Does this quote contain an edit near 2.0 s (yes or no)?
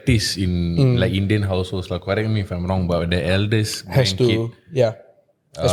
no